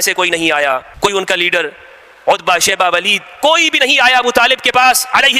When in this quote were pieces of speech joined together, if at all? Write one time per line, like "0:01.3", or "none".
none